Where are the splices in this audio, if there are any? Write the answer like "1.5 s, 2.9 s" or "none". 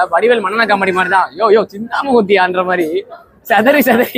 3.2 s

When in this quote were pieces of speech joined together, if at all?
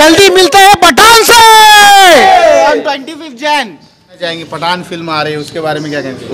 4.1 s

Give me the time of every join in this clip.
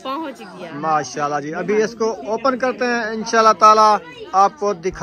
none

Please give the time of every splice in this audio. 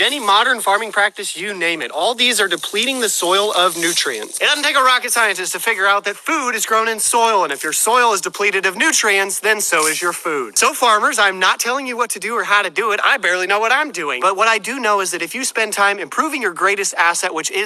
6.1 s

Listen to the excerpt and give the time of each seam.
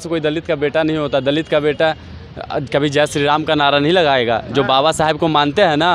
none

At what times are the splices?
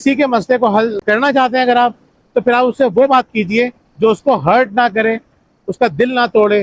1.0 s

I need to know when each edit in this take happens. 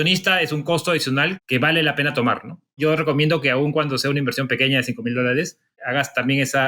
1.4 s, 2.8 s, 5.8 s

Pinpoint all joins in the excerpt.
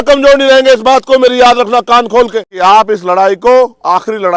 2.5 s

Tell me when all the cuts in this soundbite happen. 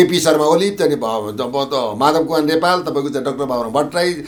none

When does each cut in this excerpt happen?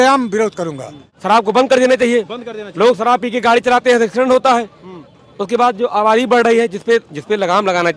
1.1 s

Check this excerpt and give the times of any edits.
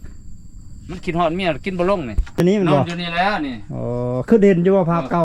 2.4 s

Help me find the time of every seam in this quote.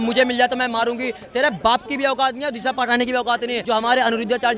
3.6 s

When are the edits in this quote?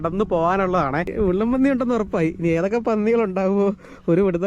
1.1 s

